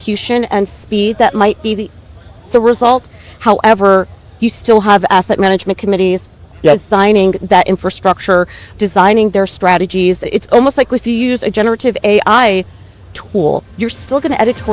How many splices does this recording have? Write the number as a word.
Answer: three